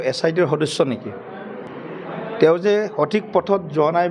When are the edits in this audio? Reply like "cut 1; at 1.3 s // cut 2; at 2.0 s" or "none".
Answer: cut 1; at 1.7 s